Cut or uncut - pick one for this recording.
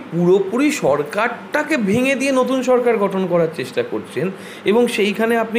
uncut